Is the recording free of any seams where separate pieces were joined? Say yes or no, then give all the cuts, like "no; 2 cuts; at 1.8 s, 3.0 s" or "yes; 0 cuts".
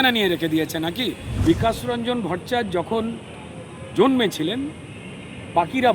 no; 1 cut; at 1.3 s